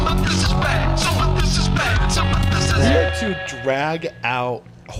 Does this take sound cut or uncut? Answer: uncut